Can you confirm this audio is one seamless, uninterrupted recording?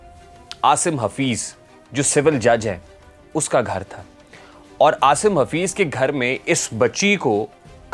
yes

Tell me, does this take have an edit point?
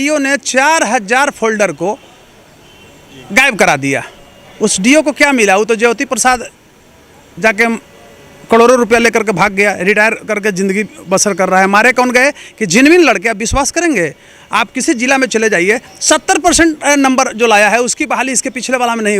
no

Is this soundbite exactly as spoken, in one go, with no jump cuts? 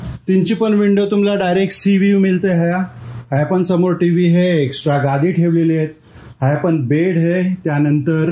yes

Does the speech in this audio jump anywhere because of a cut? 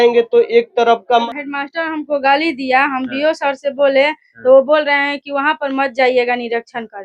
yes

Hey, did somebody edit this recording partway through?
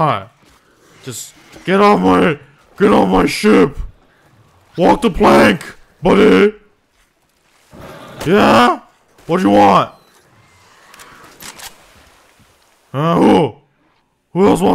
no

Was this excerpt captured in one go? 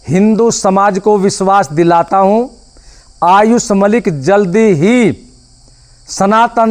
yes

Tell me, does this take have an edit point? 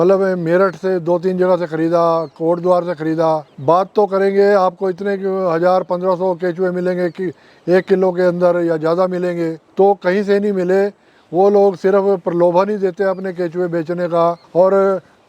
yes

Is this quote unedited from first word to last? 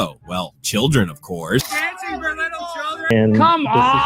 no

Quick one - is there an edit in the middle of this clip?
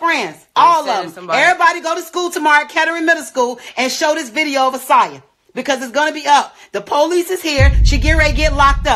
no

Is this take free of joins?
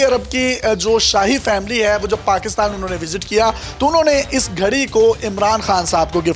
yes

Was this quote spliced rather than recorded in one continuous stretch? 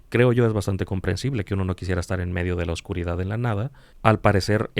yes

